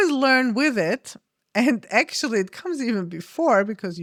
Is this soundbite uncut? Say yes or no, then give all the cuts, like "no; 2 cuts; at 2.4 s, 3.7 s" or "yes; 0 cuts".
yes; 0 cuts